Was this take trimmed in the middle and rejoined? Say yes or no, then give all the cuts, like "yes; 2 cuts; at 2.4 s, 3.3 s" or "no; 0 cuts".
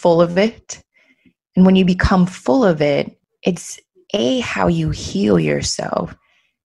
yes; 1 cut; at 3.2 s